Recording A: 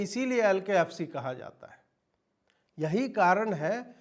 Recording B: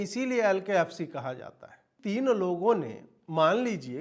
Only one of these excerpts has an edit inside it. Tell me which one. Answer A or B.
B